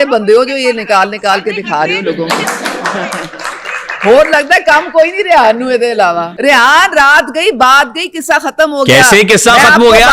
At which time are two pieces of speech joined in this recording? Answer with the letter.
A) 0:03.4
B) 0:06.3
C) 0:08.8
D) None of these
B